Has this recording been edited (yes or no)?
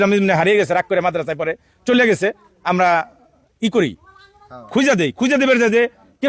no